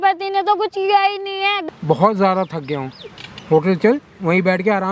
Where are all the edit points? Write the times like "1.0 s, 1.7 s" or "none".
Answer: 1.6 s, 3.3 s